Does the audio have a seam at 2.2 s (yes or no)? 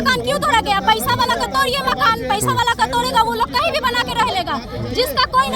no